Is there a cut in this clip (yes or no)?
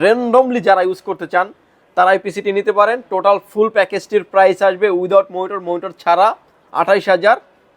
no